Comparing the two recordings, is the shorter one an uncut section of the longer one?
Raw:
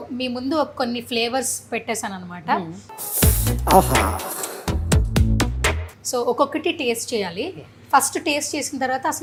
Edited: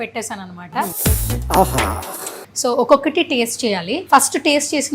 no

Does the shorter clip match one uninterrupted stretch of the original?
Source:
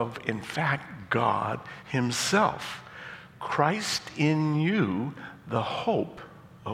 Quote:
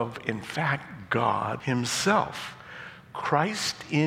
no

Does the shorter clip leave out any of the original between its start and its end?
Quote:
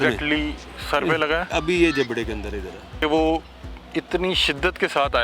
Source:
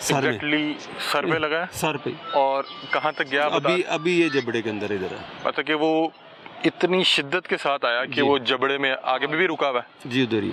yes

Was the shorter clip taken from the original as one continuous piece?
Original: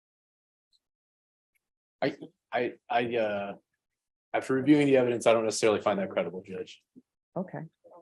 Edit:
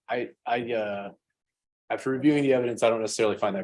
yes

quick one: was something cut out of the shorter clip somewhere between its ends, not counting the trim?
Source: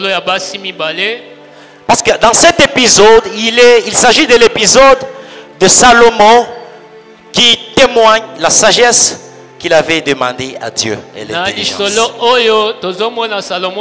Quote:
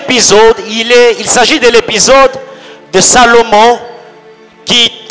no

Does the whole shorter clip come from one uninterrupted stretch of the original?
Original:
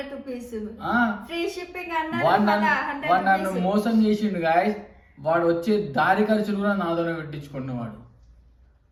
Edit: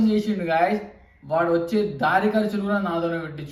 yes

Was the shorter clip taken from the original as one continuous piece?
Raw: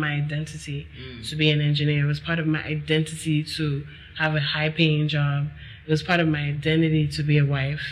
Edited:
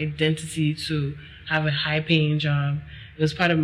yes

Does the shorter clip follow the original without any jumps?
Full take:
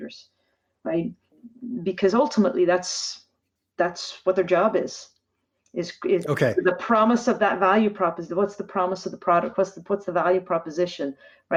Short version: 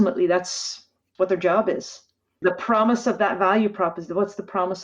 no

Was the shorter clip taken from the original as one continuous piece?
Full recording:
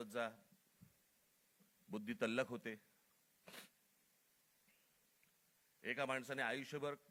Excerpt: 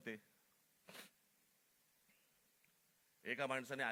yes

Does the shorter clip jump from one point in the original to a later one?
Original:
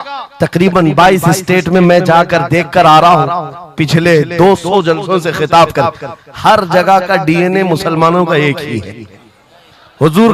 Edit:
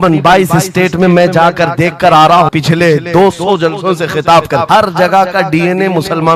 yes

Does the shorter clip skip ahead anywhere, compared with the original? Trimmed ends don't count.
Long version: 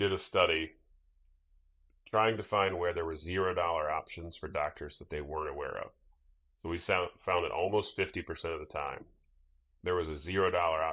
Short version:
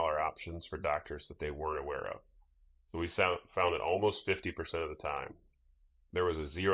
no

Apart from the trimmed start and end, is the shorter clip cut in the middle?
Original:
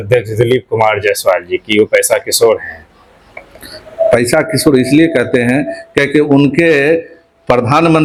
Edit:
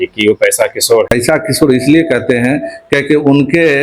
yes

